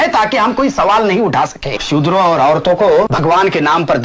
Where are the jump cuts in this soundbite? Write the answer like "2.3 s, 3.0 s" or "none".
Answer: 1.8 s, 3.1 s